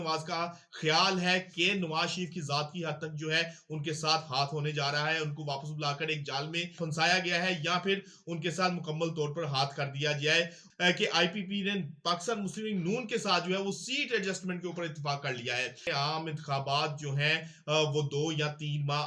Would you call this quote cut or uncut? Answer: cut